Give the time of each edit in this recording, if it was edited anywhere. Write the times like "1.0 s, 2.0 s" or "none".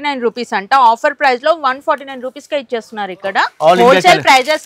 3.5 s